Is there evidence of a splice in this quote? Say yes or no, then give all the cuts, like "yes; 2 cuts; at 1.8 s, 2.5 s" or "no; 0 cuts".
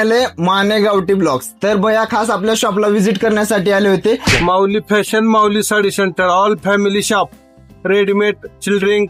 yes; 1 cut; at 4.3 s